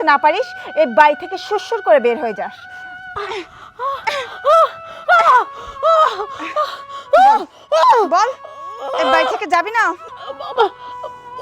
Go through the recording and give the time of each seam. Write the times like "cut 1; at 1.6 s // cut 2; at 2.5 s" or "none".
cut 1; at 10.0 s